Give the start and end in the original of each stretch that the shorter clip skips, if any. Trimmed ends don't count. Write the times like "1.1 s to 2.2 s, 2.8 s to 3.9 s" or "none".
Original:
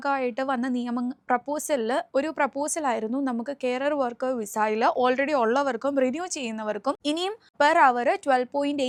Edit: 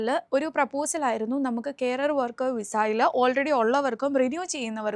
none